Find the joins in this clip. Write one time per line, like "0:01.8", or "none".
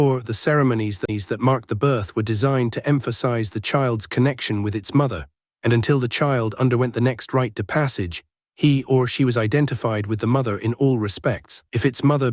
0:03.9